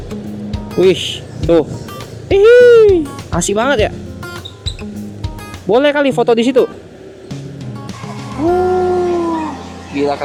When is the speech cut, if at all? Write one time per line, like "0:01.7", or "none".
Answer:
none